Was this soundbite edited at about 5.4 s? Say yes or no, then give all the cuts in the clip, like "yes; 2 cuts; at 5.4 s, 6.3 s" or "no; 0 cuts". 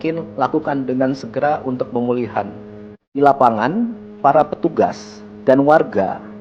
no; 1 cut; at 3.1 s